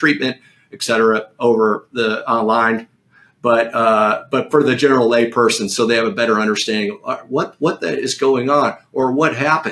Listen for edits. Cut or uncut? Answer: uncut